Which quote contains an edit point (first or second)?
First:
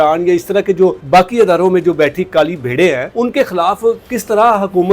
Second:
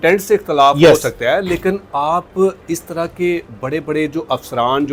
first